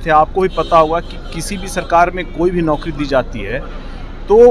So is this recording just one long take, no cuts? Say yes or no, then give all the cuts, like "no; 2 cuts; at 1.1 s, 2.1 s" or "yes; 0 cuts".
yes; 0 cuts